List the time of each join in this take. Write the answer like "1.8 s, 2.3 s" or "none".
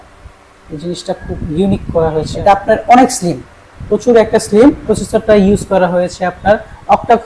2.3 s, 5.0 s